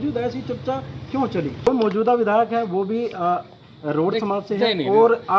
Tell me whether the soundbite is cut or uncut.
cut